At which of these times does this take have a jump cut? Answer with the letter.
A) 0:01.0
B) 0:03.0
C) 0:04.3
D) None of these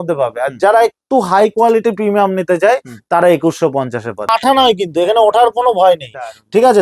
C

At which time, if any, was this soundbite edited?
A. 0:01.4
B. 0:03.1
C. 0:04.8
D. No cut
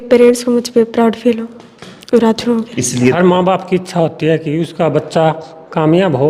B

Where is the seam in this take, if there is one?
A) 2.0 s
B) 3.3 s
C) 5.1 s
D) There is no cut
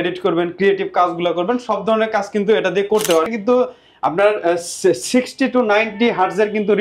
B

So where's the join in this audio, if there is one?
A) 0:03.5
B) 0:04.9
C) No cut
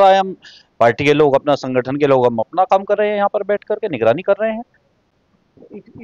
C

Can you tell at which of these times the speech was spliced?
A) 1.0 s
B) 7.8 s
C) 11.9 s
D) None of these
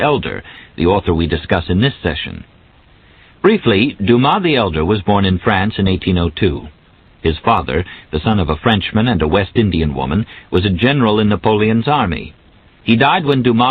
C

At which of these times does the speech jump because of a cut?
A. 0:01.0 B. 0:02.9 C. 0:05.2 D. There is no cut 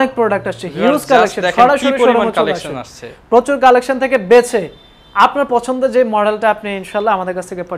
D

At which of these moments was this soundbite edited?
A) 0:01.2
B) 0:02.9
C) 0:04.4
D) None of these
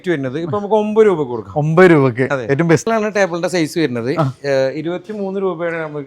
B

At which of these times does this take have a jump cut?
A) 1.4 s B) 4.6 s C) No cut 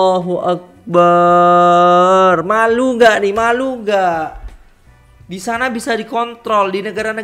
C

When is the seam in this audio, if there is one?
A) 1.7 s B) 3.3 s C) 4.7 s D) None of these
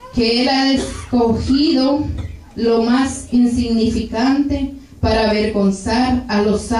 A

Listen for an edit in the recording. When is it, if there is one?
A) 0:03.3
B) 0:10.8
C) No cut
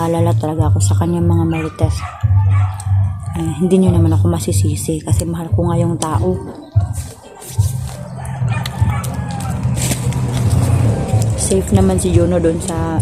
B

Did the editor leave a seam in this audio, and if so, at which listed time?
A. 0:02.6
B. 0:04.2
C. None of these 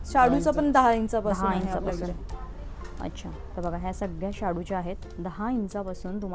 C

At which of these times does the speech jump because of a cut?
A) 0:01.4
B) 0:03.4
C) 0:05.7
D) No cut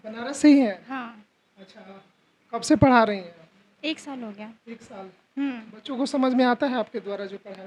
D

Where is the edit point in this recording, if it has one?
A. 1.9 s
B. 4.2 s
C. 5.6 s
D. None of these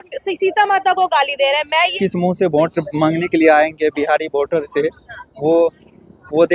A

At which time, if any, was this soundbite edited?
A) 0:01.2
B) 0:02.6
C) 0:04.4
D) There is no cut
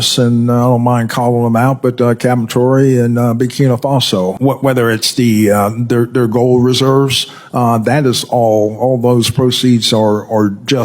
C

